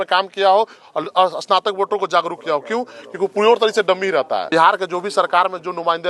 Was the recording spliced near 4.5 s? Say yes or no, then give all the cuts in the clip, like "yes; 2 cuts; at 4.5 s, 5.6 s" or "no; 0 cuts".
yes; 1 cut; at 4.5 s